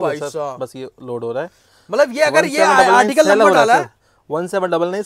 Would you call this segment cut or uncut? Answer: uncut